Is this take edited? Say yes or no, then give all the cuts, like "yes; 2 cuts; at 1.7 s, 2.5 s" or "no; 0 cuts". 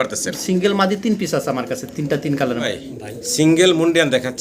yes; 1 cut; at 2.6 s